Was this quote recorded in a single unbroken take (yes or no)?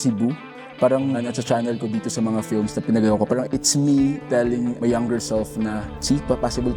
no